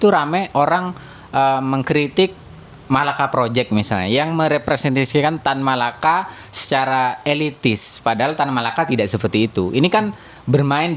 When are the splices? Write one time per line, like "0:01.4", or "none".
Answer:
none